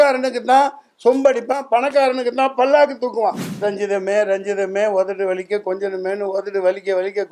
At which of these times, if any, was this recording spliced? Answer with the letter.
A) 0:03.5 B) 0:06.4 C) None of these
A